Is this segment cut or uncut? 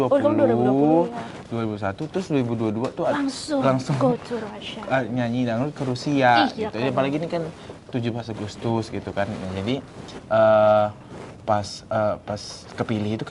uncut